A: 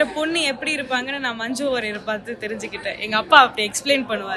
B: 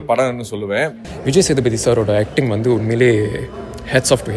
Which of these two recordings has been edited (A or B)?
B